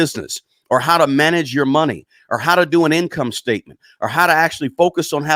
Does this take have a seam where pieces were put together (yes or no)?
no